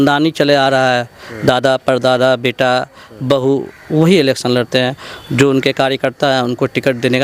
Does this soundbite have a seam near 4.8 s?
no; 0 cuts

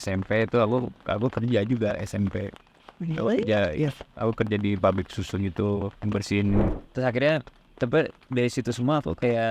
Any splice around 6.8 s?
yes; 1 cut; at 6.8 s

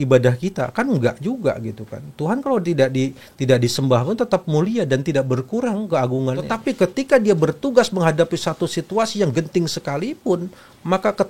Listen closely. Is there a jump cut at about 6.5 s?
yes; 1 cut; at 6.5 s

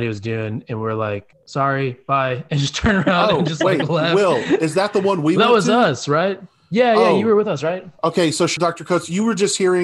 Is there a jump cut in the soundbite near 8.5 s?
yes; 2 cuts; at 1.4 s, 8.5 s

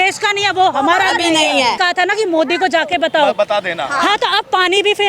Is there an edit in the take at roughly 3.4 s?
no; 1 cut; at 1.8 s

